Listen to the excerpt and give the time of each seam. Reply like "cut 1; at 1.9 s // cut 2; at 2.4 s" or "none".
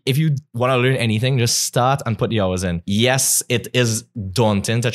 cut 1; at 2.8 s